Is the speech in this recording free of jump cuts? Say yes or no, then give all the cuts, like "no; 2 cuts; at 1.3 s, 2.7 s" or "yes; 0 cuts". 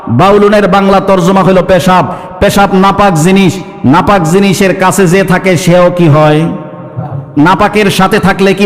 yes; 0 cuts